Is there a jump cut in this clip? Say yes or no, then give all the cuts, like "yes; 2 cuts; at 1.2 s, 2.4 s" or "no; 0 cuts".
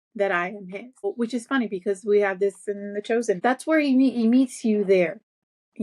yes; 2 cuts; at 1.0 s, 3.4 s